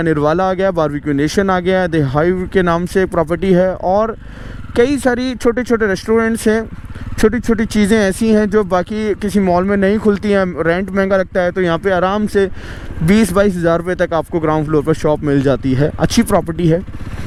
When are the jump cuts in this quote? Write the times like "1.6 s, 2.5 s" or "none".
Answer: none